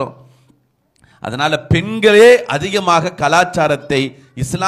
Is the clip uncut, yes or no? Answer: yes